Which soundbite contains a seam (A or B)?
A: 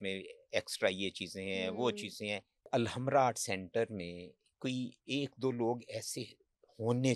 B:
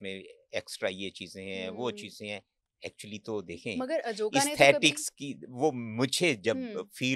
A